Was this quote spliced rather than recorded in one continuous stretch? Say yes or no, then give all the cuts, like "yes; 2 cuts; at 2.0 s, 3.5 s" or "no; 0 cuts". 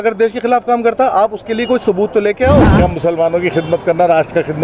yes; 1 cut; at 2.7 s